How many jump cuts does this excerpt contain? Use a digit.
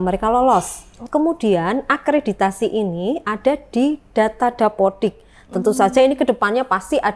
1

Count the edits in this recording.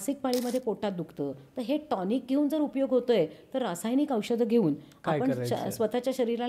0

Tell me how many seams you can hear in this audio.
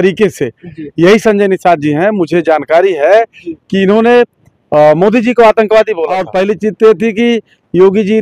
1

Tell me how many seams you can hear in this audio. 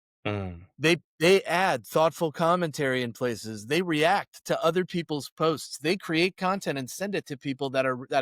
0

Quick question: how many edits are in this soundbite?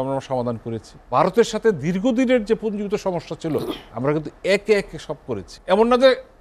2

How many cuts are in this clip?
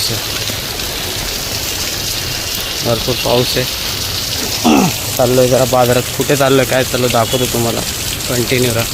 0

